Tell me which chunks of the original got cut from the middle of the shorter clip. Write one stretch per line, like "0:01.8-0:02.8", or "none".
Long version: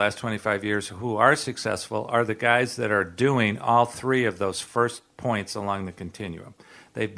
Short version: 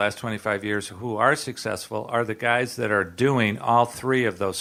none